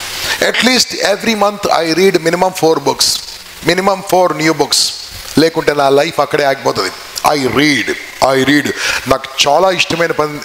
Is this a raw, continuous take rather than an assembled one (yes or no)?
yes